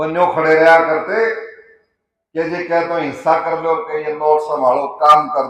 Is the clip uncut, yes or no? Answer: yes